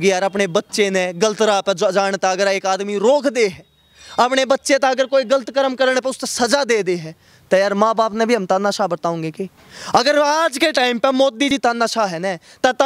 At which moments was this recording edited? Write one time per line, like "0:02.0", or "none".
none